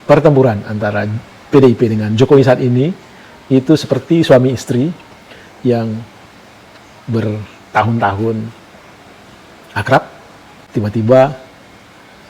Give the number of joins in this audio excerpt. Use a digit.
1